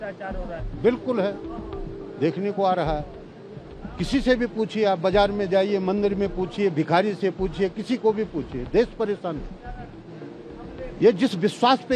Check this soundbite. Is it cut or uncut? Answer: uncut